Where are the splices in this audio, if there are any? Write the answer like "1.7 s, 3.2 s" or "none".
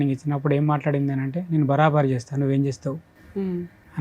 none